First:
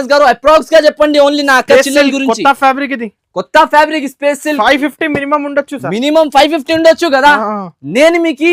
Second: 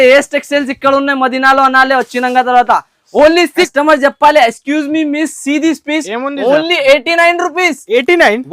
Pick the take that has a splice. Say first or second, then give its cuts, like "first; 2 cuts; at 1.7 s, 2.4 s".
second; 1 cut; at 3.7 s